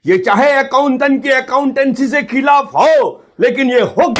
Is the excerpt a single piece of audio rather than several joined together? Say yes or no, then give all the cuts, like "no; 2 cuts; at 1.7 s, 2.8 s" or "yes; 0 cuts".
yes; 0 cuts